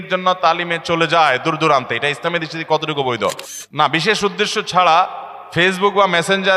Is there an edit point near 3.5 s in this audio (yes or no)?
yes